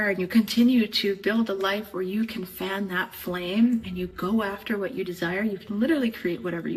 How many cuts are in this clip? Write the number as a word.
zero